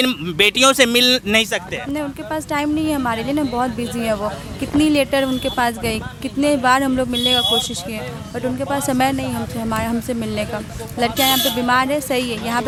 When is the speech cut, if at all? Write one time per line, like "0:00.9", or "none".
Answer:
none